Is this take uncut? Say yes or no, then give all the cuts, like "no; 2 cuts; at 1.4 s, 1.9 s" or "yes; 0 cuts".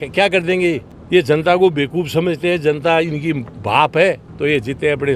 no; 2 cuts; at 0.9 s, 4.3 s